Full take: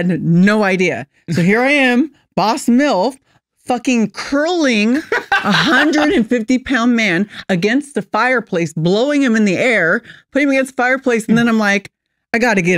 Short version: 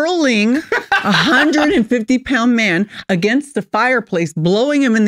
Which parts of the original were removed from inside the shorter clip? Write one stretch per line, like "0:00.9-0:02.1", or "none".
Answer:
none